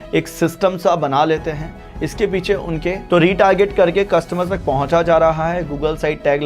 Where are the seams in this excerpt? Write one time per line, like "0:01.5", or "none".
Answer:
0:03.0